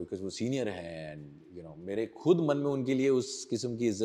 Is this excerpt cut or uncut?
uncut